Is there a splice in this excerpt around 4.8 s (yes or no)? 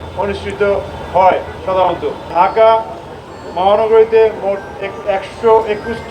no